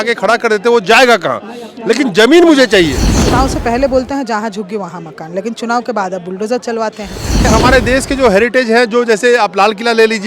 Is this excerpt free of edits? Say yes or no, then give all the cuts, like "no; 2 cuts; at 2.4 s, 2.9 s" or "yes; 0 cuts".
no; 2 cuts; at 3.2 s, 7.5 s